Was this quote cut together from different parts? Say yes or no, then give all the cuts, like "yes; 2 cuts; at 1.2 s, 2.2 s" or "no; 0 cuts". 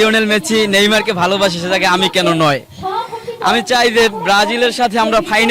no; 0 cuts